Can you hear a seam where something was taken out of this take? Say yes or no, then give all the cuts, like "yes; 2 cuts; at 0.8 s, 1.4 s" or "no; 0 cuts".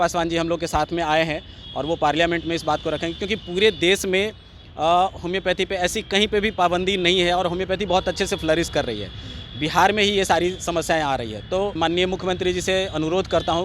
yes; 1 cut; at 11.8 s